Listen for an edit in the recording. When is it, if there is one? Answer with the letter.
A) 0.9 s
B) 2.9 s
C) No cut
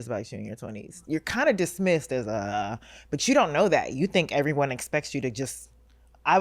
A